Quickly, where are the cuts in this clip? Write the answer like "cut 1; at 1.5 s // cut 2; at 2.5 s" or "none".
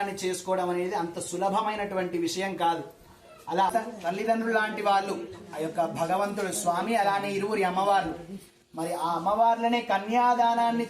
cut 1; at 3.7 s